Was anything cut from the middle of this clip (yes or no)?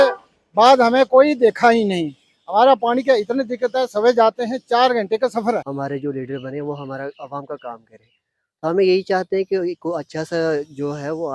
yes